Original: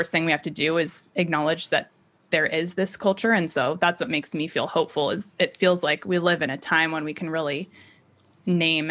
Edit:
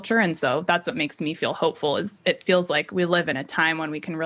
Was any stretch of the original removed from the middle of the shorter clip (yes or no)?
no